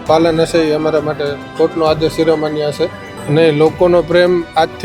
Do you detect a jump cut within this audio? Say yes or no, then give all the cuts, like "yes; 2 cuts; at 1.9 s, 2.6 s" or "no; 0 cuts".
yes; 1 cut; at 3.2 s